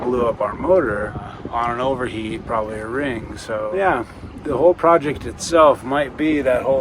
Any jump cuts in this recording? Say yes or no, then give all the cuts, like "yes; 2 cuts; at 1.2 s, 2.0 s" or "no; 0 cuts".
yes; 2 cuts; at 1.4 s, 3.7 s